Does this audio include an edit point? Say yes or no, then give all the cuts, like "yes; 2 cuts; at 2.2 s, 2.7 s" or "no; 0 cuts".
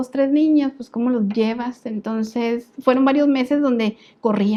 no; 0 cuts